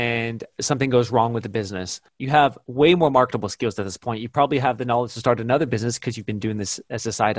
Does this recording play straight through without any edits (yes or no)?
no